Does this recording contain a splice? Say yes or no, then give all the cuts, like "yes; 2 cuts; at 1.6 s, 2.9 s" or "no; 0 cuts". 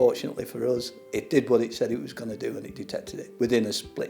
yes; 1 cut; at 3.2 s